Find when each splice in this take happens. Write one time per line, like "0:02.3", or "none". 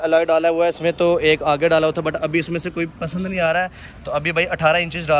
none